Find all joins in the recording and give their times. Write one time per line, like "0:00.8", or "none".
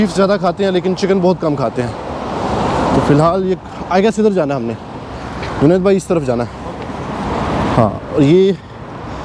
none